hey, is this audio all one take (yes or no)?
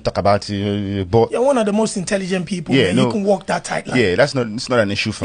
yes